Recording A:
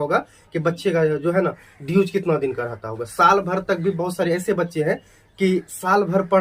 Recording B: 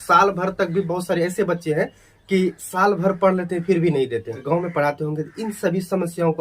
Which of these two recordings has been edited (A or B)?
B